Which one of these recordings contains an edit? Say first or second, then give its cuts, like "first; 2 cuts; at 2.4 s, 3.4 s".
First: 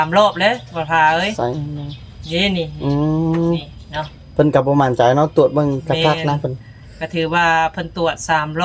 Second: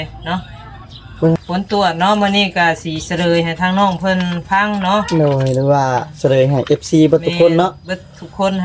second; 1 cut; at 1.4 s